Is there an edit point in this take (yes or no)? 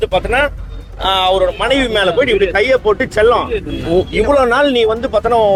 no